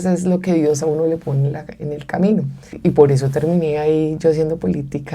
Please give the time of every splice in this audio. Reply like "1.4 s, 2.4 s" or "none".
2.8 s